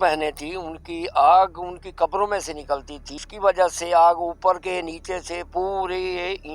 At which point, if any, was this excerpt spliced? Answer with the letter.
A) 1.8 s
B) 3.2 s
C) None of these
B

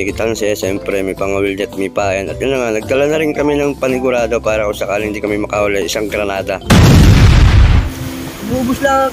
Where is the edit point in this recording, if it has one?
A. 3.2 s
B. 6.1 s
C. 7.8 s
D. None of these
C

